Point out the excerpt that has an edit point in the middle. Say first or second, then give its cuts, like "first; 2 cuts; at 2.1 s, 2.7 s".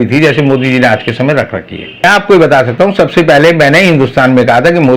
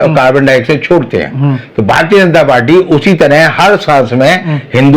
first; 1 cut; at 2.0 s